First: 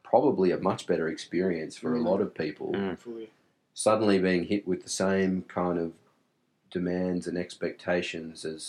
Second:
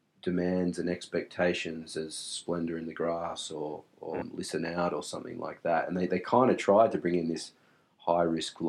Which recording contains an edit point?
second; 1 cut; at 4.2 s

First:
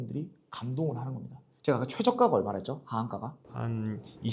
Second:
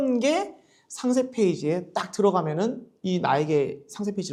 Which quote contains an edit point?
first; 1 cut; at 1.5 s

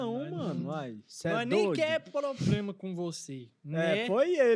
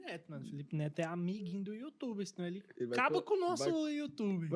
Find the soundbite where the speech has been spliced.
second; 1 cut; at 2.7 s

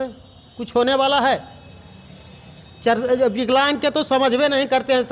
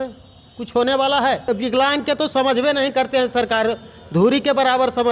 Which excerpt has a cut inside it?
second; 1 cut; at 1.5 s

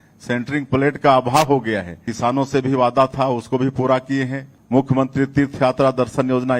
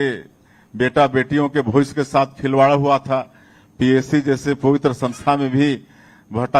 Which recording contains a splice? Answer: first; 2 cuts; at 2.0 s, 4.6 s

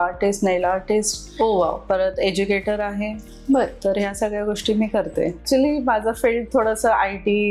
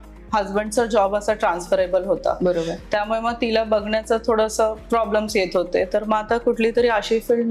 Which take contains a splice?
first; 1 cut; at 5.4 s

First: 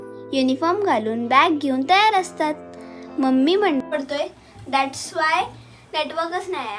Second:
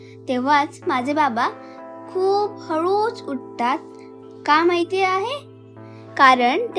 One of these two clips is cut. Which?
first; 1 cut; at 3.8 s

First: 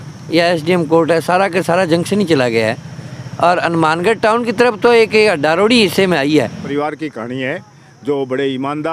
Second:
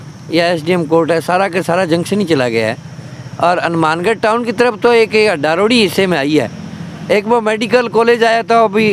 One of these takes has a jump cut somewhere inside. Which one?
first; 1 cut; at 6.6 s

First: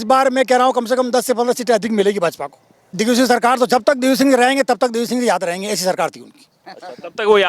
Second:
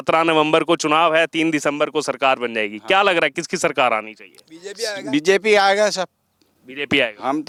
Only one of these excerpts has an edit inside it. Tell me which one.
first; 1 cut; at 3.0 s

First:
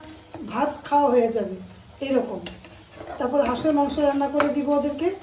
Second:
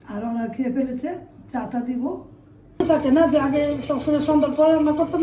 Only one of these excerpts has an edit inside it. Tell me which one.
second; 1 cut; at 2.8 s

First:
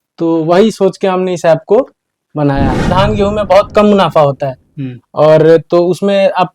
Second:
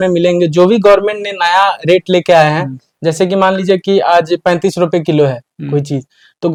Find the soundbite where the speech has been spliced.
first; 1 cut; at 2.9 s

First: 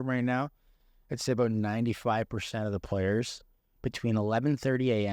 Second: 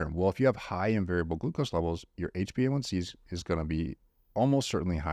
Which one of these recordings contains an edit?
first; 1 cut; at 3.4 s

